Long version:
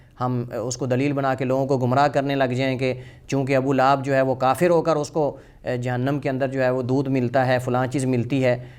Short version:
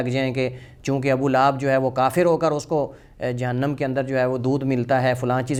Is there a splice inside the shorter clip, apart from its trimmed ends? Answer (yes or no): no